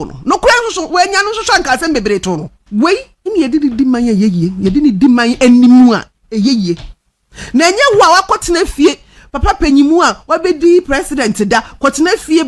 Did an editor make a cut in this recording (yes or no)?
yes